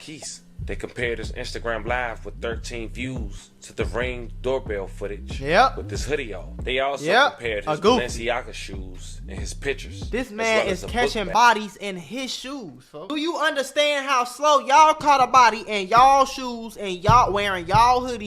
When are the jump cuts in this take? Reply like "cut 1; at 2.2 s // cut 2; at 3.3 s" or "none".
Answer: cut 1; at 13.1 s